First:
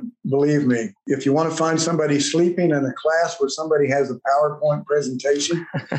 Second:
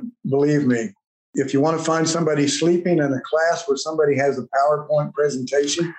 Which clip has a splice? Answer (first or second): first